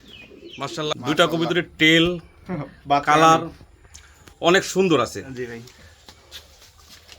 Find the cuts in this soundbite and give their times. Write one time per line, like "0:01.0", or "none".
0:00.9